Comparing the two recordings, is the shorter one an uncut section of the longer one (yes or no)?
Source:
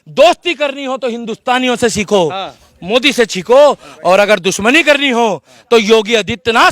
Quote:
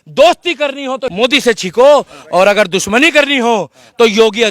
no